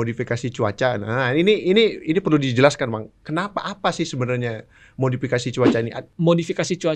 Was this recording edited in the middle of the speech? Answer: yes; 1 cut; at 6.0 s

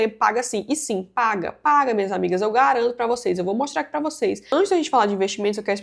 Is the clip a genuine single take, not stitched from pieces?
no; 1 cut; at 4.5 s

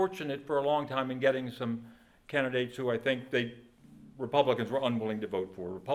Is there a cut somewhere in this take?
no; 0 cuts

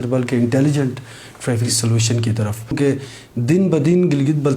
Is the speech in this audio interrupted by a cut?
yes; 1 cut; at 2.8 s

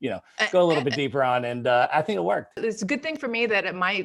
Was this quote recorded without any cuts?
no; 1 cut; at 2.6 s

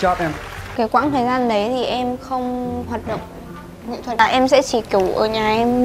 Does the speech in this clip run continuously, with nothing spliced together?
no; 2 cuts; at 0.7 s, 4.1 s

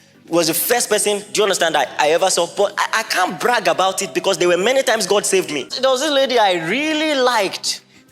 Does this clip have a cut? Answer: yes; 1 cut; at 5.7 s

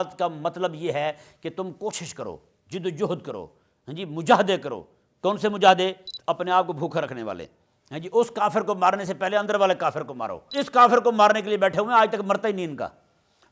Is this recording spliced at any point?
yes; 2 cuts; at 6.1 s, 10.4 s

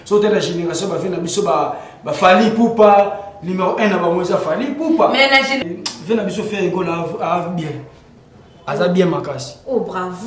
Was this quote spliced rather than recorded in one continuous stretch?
yes; 1 cut; at 5.6 s

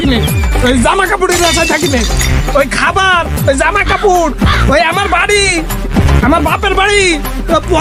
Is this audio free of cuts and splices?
yes; 0 cuts

